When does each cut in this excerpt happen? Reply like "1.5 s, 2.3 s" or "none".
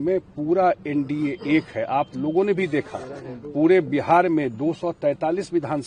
none